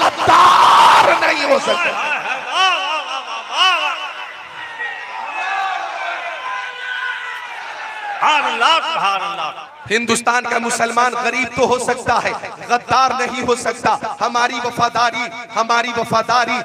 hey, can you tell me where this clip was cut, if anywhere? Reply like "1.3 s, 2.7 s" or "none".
9.6 s